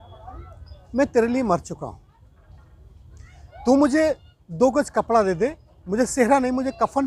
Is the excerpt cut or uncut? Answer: uncut